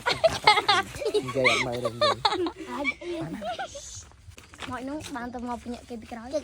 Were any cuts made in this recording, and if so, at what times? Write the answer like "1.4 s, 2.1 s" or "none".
4.5 s